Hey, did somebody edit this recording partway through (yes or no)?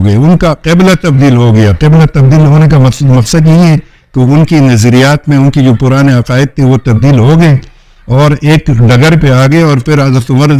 no